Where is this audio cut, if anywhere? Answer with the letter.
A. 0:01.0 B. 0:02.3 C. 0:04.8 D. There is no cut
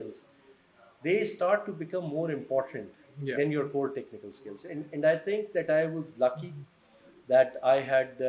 D